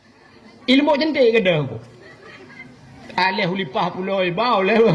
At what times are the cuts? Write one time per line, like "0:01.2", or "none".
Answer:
none